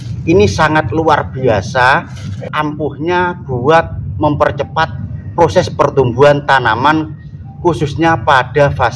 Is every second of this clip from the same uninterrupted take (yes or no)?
no